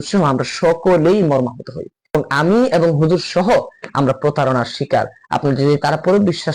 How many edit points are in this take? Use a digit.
2